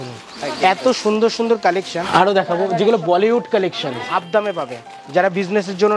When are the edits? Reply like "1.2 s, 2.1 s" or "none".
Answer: 2.0 s, 4.1 s